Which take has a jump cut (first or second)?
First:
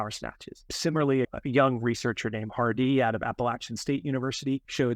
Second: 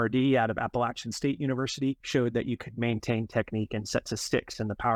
first